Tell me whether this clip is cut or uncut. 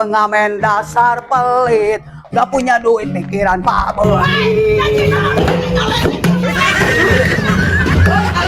uncut